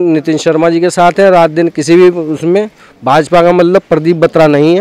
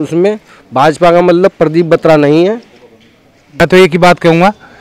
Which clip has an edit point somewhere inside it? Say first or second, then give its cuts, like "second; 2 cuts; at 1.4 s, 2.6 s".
second; 1 cut; at 3.5 s